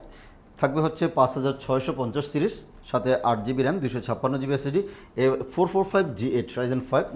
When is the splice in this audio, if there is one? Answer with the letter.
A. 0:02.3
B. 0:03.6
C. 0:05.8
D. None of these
D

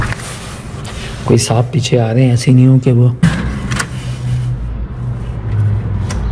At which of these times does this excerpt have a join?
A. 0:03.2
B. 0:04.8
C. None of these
A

